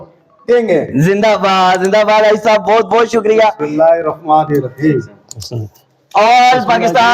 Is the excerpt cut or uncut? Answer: uncut